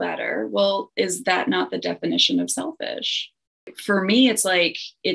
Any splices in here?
yes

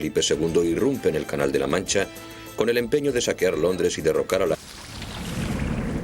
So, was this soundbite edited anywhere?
no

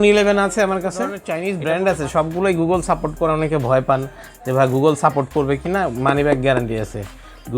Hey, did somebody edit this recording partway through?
yes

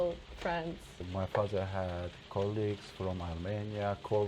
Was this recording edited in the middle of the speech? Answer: yes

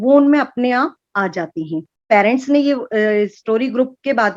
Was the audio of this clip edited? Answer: yes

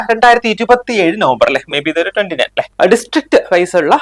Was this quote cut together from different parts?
yes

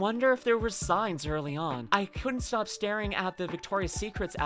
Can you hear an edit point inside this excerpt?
yes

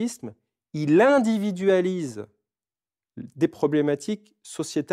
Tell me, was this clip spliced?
no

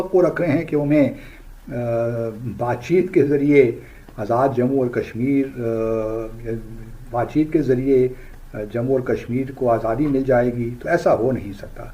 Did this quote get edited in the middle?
no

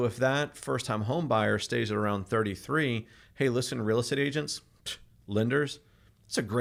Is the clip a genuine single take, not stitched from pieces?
yes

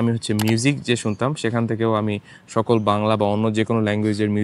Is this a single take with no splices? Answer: yes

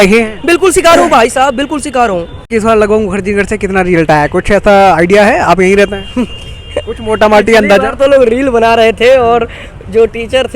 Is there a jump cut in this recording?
yes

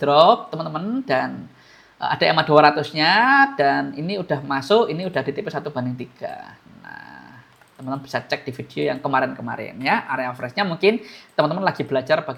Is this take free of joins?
yes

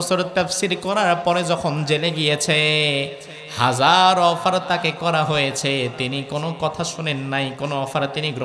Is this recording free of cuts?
yes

